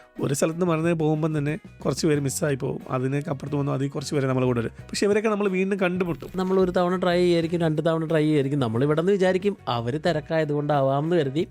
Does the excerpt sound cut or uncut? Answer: cut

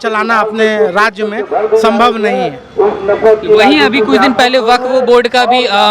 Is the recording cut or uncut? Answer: uncut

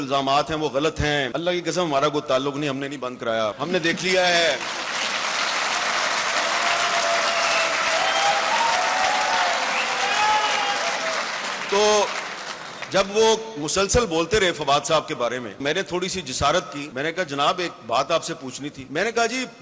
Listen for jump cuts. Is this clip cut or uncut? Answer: cut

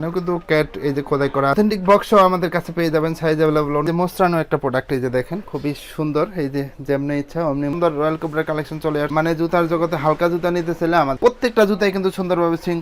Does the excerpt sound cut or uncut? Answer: cut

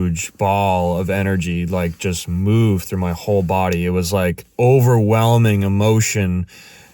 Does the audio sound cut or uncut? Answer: cut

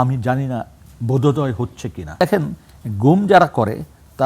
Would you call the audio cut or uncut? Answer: cut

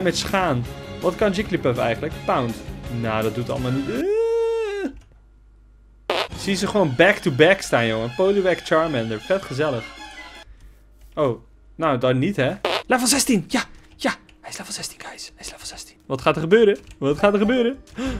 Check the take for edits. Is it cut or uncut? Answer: cut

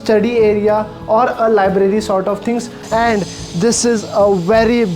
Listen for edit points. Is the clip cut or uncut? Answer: cut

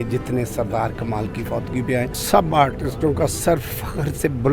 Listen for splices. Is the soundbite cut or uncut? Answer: cut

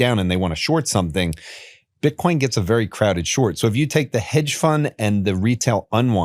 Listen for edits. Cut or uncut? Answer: uncut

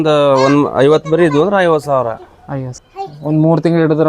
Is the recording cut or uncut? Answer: cut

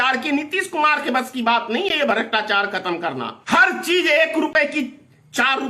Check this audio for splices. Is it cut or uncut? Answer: cut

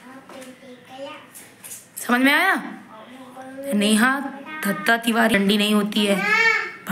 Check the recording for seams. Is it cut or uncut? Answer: cut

